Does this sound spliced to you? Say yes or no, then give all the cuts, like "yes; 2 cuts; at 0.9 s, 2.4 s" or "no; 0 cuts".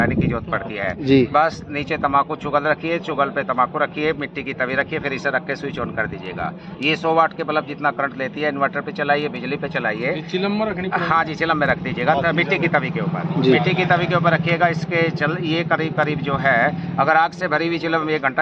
no; 0 cuts